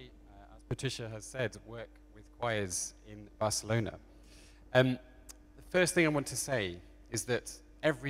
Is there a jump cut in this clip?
yes; 1 cut; at 4.0 s

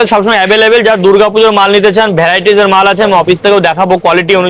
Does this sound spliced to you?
no; 0 cuts

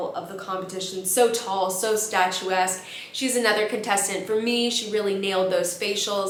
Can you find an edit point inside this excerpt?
no; 0 cuts

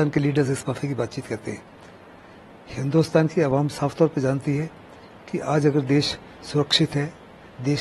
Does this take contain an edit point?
no; 0 cuts

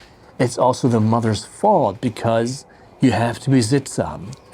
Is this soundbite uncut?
yes; 0 cuts

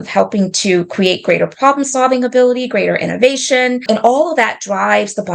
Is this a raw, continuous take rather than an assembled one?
no; 1 cut; at 3.8 s

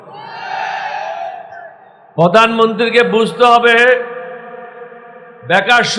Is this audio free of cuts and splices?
no; 1 cut; at 1.6 s

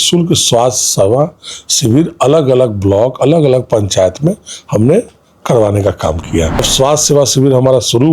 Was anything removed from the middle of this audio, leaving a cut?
yes; 1 cut; at 6.7 s

